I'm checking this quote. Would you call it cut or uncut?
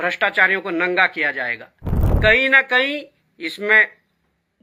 cut